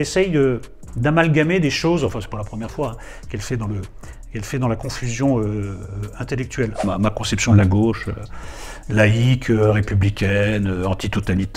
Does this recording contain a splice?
yes; 1 cut; at 6.8 s

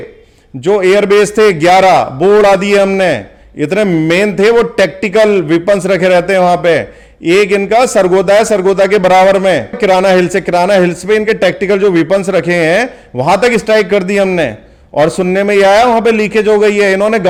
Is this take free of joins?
yes; 0 cuts

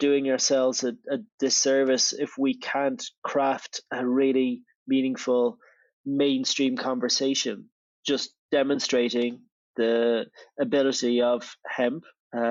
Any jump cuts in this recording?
no; 0 cuts

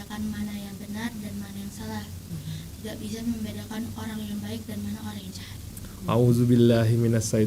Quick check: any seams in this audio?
yes; 1 cut; at 5.6 s

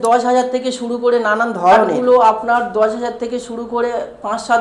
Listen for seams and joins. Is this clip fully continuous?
no; 1 cut; at 1.9 s

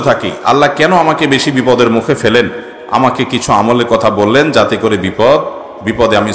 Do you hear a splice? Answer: no; 0 cuts

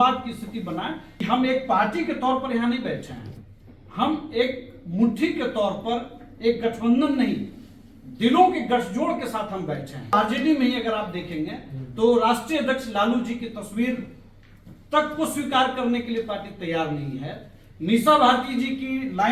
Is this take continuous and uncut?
no; 2 cuts; at 1.2 s, 10.1 s

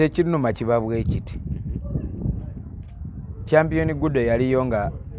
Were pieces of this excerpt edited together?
no; 0 cuts

